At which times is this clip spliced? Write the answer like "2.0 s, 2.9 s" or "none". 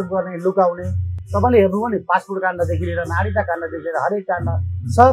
none

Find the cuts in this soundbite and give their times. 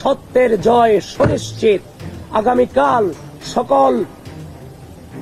2.1 s

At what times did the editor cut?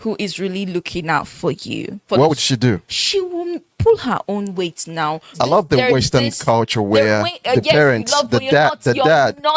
2.1 s, 2.9 s, 5.3 s

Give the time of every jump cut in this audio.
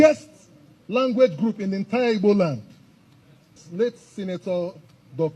3.6 s

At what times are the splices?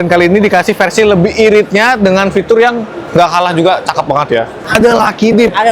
4.6 s

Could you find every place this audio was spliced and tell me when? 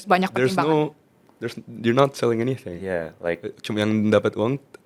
none

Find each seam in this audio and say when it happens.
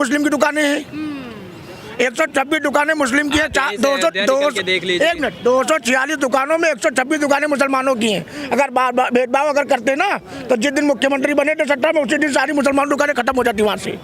none

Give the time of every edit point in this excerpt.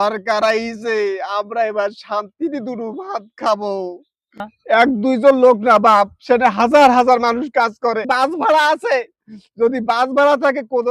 4.5 s, 8.1 s

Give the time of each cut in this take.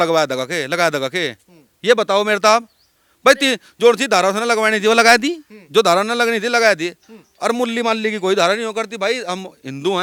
none

